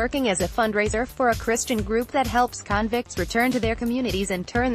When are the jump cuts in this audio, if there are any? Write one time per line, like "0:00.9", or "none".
none